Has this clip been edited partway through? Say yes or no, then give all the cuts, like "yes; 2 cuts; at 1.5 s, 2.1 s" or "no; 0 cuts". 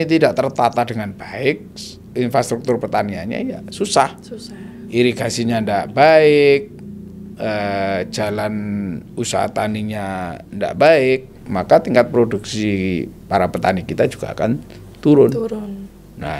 no; 0 cuts